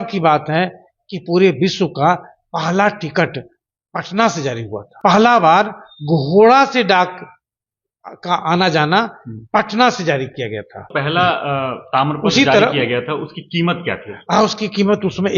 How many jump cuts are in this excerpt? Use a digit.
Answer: 2